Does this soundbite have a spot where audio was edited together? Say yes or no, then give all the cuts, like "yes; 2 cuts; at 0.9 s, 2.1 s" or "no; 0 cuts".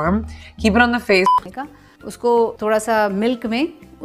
yes; 1 cut; at 1.3 s